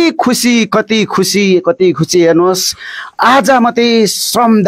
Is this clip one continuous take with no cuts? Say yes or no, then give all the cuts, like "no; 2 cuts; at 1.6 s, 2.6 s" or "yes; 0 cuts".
yes; 0 cuts